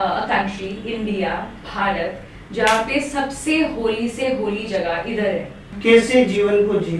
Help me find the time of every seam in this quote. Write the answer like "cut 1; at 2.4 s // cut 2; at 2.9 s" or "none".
cut 1; at 5.7 s